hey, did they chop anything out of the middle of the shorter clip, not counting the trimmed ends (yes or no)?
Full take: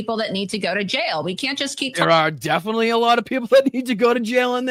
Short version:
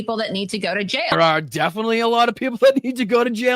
yes